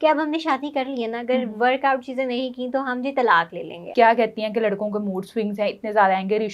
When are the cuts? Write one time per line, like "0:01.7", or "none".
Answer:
0:03.8